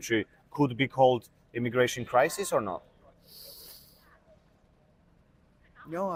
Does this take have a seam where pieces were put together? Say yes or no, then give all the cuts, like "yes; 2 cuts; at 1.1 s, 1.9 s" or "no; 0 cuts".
no; 0 cuts